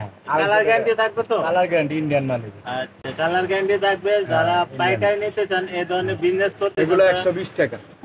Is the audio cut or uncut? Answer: uncut